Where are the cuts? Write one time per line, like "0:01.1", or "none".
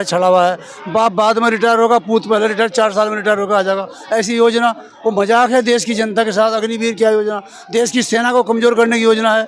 none